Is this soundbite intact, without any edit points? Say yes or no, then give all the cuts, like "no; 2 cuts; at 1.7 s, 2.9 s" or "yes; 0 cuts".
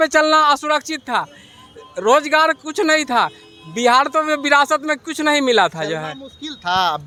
yes; 0 cuts